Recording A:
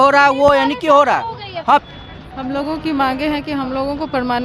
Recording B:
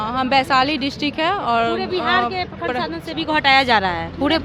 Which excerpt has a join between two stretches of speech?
A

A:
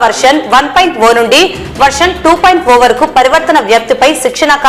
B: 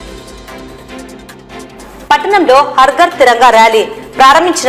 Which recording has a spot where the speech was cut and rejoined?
B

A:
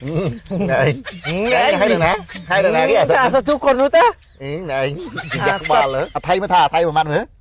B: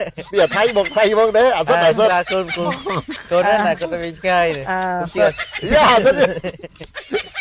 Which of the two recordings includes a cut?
A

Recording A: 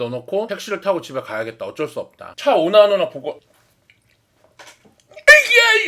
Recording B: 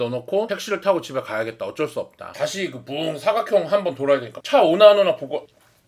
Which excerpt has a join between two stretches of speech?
A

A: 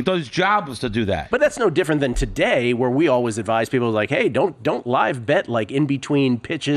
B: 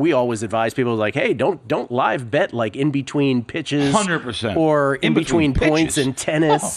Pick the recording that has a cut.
A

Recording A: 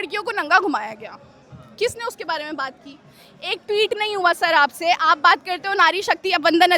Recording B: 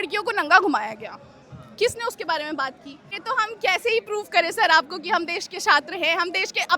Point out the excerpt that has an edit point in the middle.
B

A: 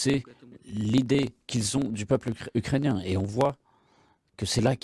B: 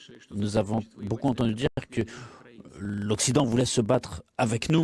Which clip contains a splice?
A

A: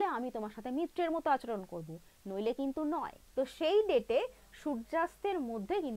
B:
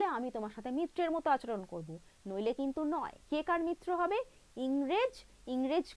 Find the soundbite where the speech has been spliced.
A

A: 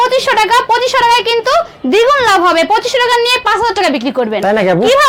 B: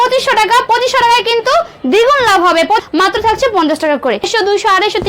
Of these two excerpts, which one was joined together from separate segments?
B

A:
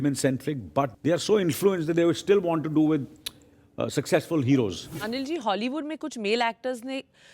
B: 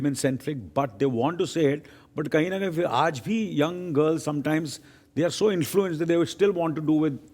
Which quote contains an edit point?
A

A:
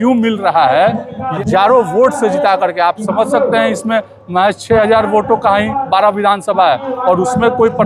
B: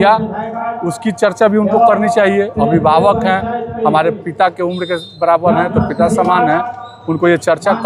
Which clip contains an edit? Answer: A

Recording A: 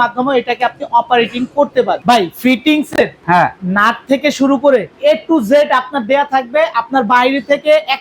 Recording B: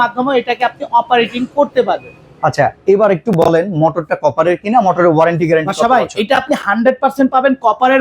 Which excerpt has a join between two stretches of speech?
A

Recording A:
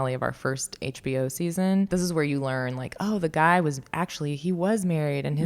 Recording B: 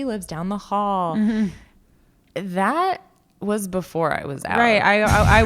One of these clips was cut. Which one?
A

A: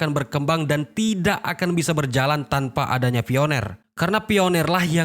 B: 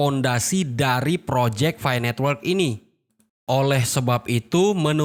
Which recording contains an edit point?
A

